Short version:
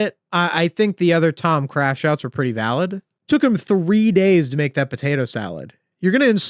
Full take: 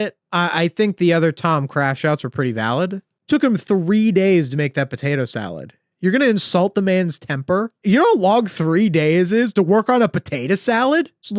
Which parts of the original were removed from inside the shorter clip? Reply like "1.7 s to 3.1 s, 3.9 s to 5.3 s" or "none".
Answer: none